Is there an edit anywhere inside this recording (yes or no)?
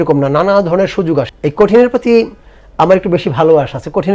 yes